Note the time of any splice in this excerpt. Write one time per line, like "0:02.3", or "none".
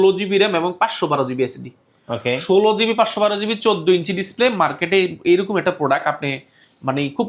none

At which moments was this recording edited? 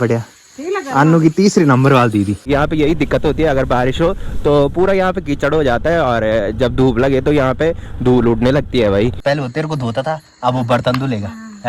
0:02.4
0:09.2

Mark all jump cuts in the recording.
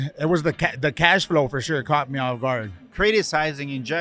0:02.8

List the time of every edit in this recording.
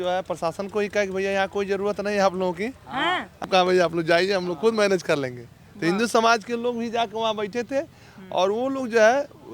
0:03.4

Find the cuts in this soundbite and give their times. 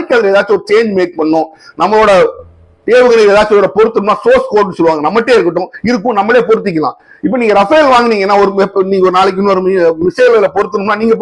none

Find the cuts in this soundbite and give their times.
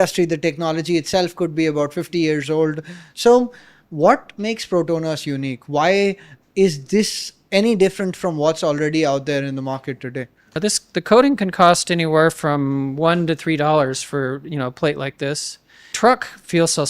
0:10.4
0:15.9

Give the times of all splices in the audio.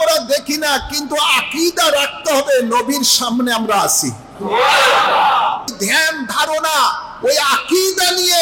0:05.7

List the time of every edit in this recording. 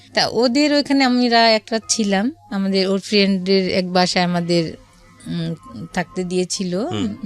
none

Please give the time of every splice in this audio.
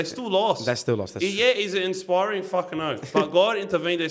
none

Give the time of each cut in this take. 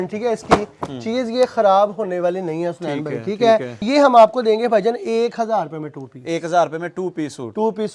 0:03.8

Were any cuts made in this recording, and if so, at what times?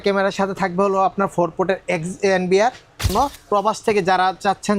0:03.1

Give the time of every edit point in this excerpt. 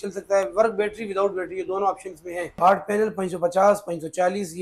0:02.6

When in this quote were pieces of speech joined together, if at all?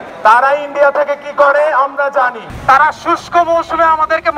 0:02.5

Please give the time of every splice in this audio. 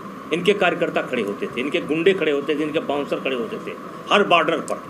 none

